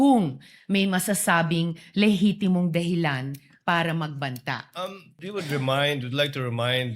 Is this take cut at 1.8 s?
no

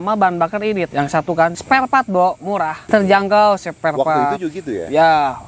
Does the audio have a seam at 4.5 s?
no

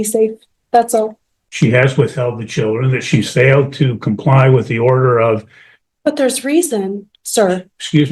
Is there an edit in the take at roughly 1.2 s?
yes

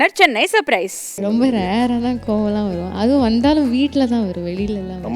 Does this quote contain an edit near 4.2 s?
no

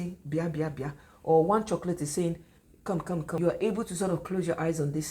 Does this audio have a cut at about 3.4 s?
yes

